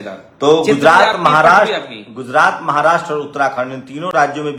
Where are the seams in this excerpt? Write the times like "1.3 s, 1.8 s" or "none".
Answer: none